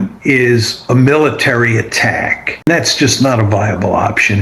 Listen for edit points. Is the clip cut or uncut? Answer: cut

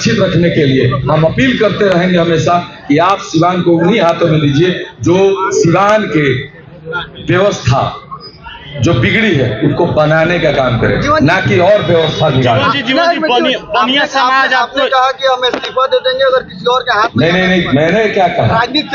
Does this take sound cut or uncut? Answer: uncut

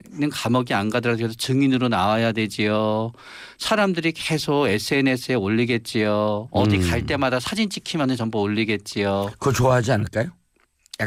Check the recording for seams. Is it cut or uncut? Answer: uncut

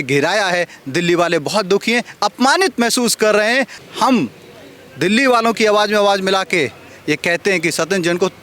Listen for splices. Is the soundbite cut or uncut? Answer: cut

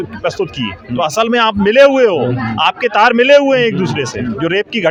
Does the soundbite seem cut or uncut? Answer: uncut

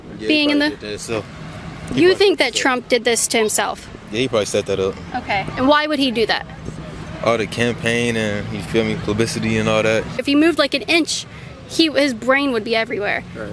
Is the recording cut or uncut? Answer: cut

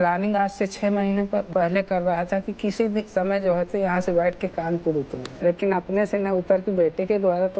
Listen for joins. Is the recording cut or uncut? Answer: cut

